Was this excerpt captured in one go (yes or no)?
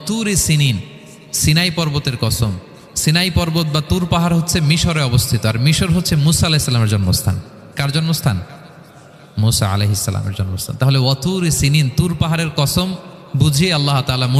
yes